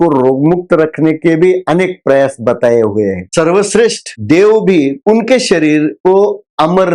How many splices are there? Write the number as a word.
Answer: two